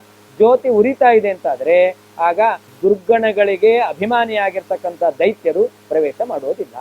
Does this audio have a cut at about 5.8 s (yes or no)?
no